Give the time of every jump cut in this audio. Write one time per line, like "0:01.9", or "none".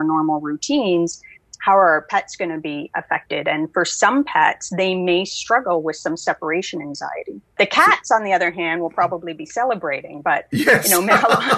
0:07.6